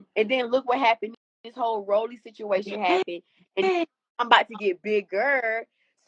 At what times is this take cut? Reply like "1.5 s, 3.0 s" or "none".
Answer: none